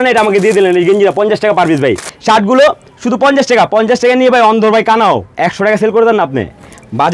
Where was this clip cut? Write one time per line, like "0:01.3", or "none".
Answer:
0:02.1